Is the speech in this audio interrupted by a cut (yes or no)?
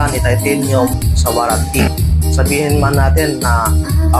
no